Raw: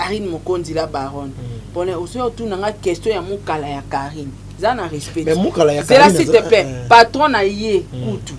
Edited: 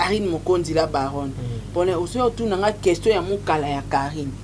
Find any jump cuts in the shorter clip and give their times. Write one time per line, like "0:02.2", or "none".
none